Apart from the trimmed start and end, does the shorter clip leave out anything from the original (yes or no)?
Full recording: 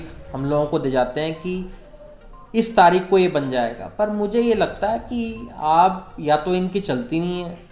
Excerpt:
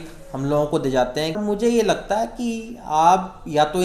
yes